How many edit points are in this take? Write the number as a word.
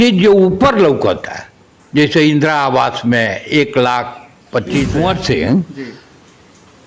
one